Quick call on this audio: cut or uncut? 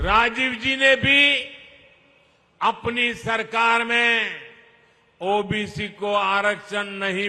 uncut